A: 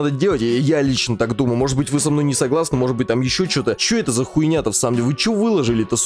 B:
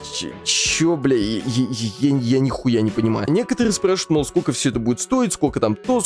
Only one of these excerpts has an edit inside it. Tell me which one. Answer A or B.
A